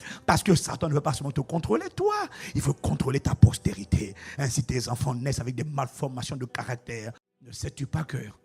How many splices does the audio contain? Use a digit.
1